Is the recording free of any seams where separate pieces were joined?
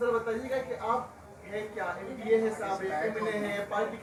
yes; 0 cuts

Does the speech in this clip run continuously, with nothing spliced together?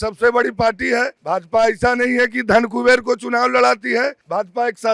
no; 1 cut; at 1.2 s

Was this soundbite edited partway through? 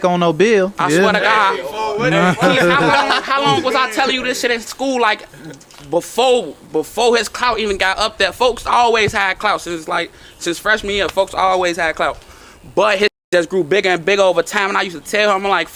no; 0 cuts

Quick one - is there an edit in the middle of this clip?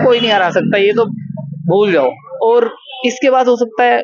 yes; 1 cut; at 2.3 s

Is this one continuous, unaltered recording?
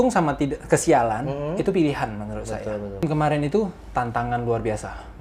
no; 1 cut; at 3.0 s

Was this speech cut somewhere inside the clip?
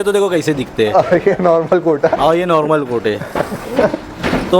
no; 0 cuts

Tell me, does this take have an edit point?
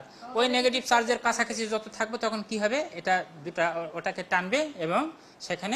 no; 0 cuts

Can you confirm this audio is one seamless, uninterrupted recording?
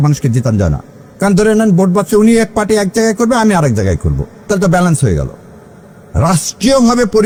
yes; 0 cuts

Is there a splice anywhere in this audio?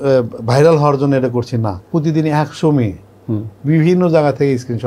yes; 1 cut; at 1.9 s

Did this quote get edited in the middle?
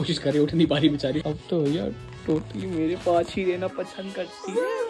yes; 1 cut; at 1.4 s

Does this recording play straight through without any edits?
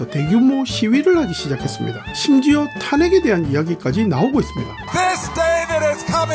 yes; 0 cuts

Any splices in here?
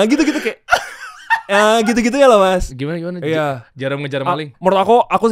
yes; 2 cuts; at 2.7 s, 4.5 s

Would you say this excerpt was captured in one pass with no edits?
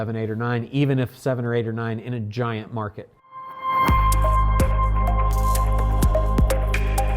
no; 1 cut; at 3.0 s

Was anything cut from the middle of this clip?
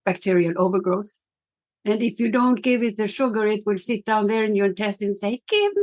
no; 0 cuts

